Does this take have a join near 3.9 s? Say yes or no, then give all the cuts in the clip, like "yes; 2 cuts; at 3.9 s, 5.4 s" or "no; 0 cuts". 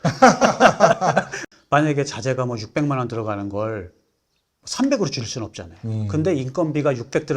no; 1 cut; at 1.5 s